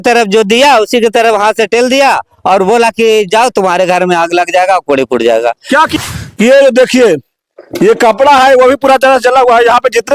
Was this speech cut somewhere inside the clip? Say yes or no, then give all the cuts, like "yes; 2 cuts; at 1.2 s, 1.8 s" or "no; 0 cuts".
yes; 1 cut; at 5.9 s